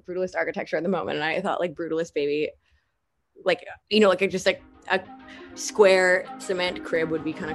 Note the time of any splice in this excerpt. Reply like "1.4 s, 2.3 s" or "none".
none

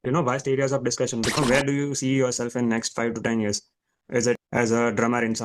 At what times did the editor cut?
1.4 s, 4.4 s

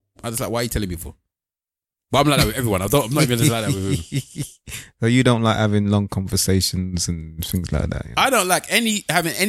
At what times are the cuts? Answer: none

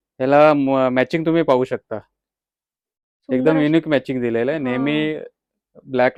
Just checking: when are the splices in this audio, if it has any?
none

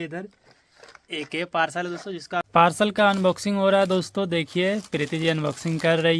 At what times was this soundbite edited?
2.4 s

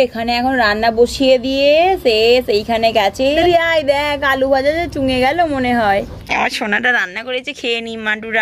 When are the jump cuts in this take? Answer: 3.3 s, 6.2 s

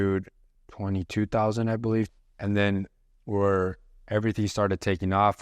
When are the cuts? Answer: 2.1 s

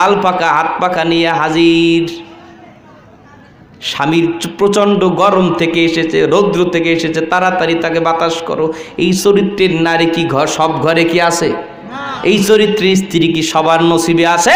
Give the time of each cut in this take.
none

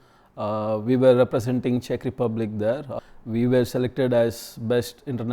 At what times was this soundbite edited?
2.9 s

